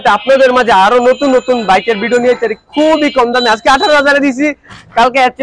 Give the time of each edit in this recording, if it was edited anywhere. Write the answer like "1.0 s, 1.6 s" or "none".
none

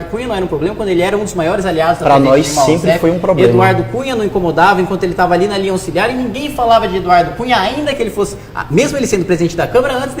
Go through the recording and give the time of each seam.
8.5 s

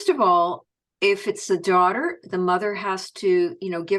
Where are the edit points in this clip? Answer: none

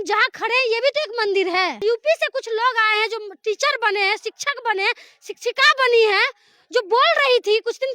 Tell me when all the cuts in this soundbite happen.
1.8 s

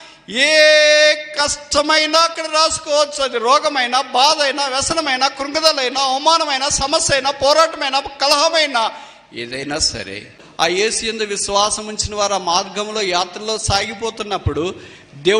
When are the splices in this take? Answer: 10.4 s

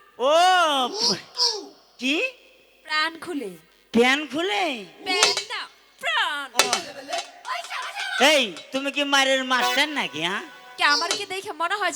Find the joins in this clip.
none

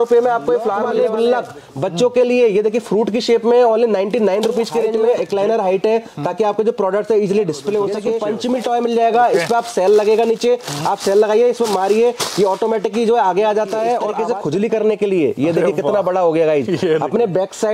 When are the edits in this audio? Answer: 0.9 s, 5.0 s, 8.2 s, 14.1 s

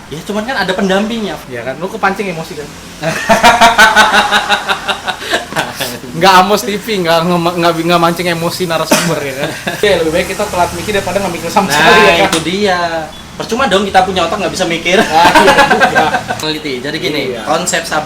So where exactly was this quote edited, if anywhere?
1.4 s, 9.8 s, 16.4 s

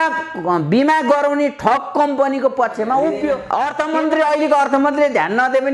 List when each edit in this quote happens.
3.5 s

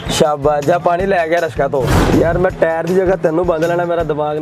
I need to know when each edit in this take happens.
2.0 s

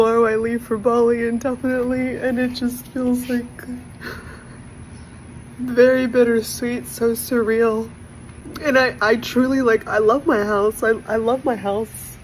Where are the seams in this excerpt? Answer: none

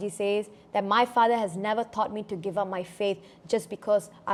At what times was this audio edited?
none

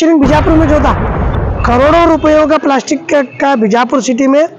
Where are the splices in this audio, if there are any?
1.4 s

